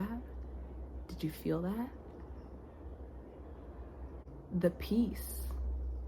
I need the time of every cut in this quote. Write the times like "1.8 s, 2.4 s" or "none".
4.2 s